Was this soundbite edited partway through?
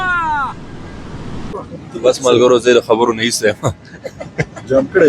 yes; 1 cut; at 1.7 s

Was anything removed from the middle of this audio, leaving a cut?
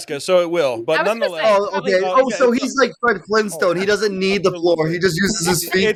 no; 0 cuts

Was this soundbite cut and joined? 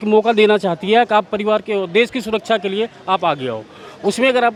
no; 0 cuts

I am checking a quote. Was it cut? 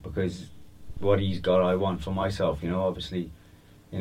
no; 0 cuts

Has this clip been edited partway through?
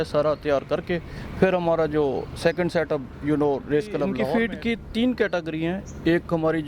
yes; 1 cut; at 4.2 s

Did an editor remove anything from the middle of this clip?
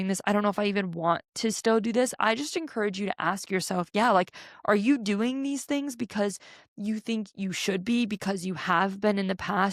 no; 0 cuts

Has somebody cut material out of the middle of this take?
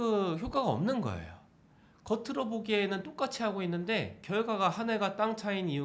no; 0 cuts

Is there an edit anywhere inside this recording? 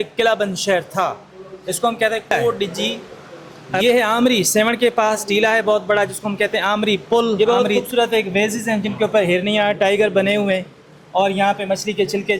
yes; 2 cuts; at 3.8 s, 7.4 s

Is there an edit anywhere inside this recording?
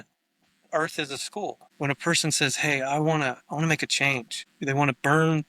yes; 2 cuts; at 1.6 s, 4.4 s

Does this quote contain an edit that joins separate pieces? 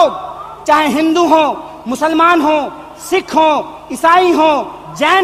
no; 0 cuts

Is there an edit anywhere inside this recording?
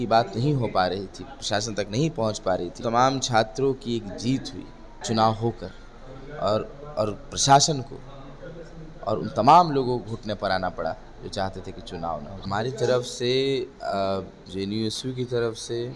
yes; 3 cuts; at 2.8 s, 5.0 s, 12.4 s

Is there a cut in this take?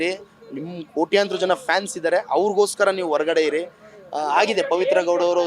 no; 0 cuts

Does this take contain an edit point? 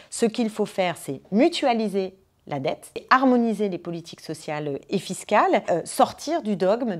yes; 2 cuts; at 3.0 s, 5.7 s

